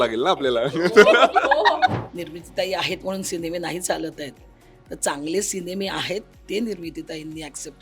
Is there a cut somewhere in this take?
yes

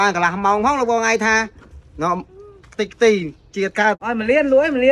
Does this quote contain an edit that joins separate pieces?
yes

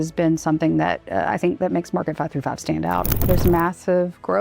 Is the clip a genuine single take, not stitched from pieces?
no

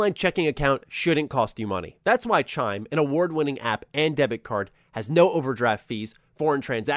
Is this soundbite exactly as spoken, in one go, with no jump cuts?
yes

